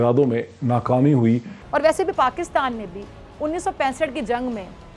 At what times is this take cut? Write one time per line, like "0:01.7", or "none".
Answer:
0:01.5